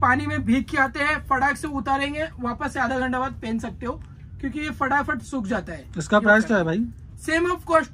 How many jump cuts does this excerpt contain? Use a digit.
0